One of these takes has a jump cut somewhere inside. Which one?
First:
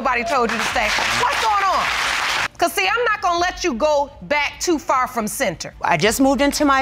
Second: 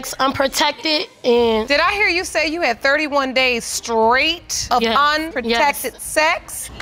first; 1 cut; at 5.8 s

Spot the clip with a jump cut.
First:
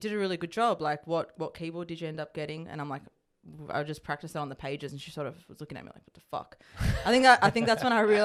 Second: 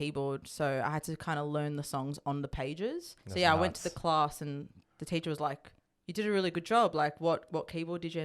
second; 1 cut; at 3.1 s

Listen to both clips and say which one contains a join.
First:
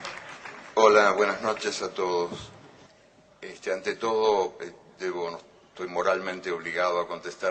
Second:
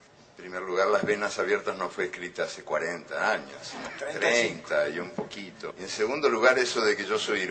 first; 1 cut; at 5.2 s

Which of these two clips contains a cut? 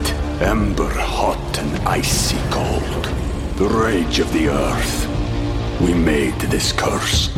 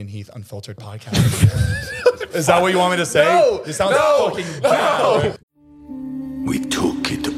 second; 1 cut; at 5.4 s

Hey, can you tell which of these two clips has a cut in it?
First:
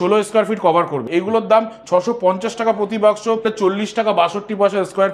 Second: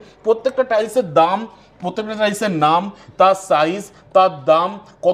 first; 2 cuts; at 1.0 s, 3.4 s

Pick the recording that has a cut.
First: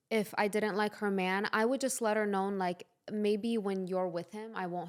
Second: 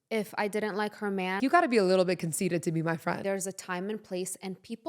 second; 2 cuts; at 1.4 s, 3.2 s

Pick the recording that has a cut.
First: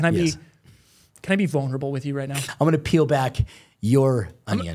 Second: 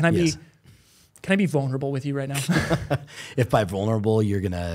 first; 1 cut; at 2.3 s

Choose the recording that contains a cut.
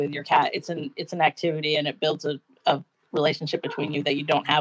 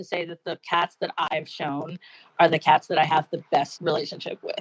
second; 2 cuts; at 1.3 s, 3.7 s

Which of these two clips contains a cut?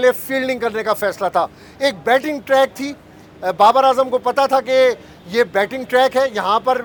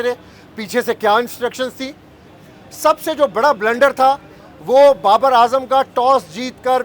second; 1 cut; at 2.4 s

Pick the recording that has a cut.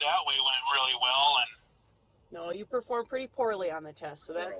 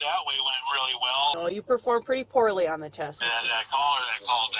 second; 2 cuts; at 1.4 s, 3.1 s

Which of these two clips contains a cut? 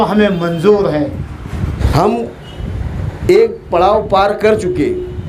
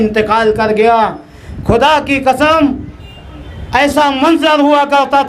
first; 1 cut; at 1.8 s

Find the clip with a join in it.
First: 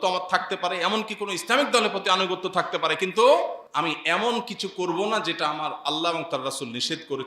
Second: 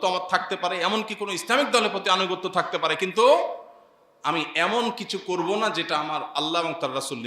first; 1 cut; at 3.6 s

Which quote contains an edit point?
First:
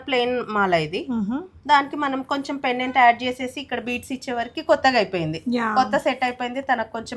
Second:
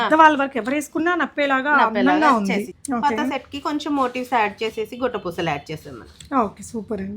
second; 1 cut; at 2.8 s

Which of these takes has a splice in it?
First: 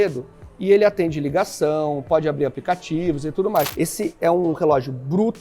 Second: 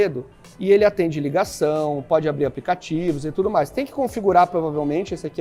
first; 1 cut; at 3.7 s

